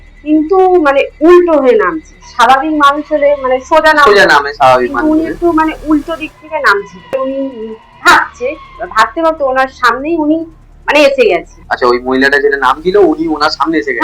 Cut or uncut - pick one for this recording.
cut